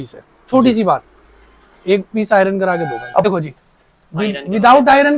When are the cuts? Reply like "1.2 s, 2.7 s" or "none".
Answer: 3.2 s